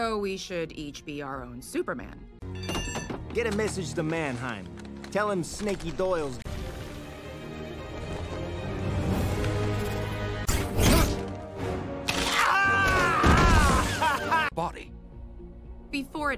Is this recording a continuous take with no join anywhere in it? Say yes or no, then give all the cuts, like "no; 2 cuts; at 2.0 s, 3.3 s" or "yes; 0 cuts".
yes; 0 cuts